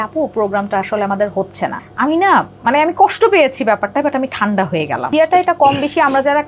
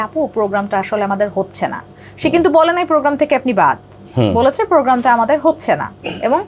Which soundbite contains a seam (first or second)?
first